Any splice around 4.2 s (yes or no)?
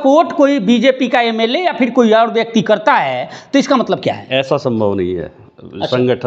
no